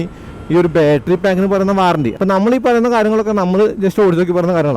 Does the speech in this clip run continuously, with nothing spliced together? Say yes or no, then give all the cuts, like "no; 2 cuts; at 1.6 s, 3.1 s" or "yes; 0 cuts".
no; 1 cut; at 2.1 s